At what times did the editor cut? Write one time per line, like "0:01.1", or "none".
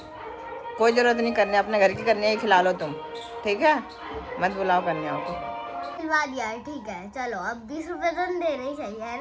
0:05.9